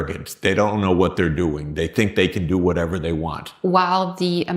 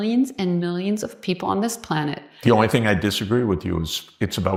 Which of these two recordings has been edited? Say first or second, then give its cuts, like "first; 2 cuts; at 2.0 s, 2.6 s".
first; 1 cut; at 3.4 s